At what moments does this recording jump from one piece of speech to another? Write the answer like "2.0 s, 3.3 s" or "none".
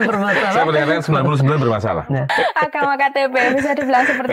2.3 s